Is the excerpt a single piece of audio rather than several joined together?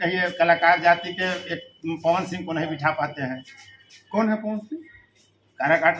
yes; 0 cuts

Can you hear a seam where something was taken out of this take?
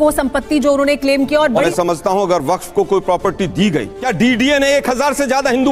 yes; 2 cuts; at 1.7 s, 3.9 s

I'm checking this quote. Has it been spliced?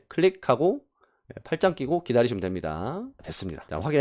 no; 0 cuts

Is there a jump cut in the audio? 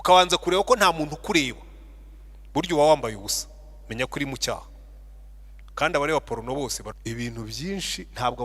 yes; 1 cut; at 6.9 s

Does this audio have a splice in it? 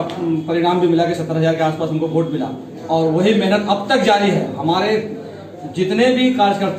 no; 0 cuts

